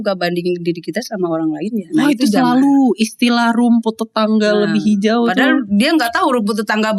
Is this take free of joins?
yes; 0 cuts

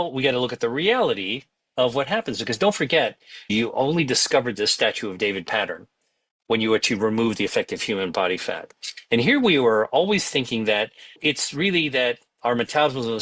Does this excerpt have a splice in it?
yes; 1 cut; at 3.5 s

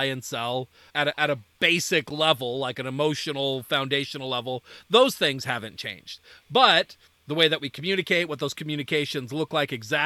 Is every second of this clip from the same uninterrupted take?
yes; 0 cuts

